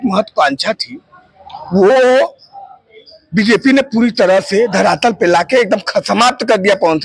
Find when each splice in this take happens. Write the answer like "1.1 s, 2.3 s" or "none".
none